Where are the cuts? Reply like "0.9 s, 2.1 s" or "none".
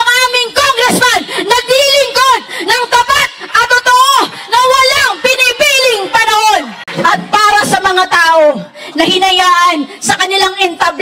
6.8 s